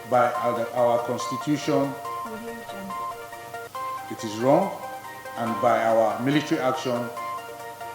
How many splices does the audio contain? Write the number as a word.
two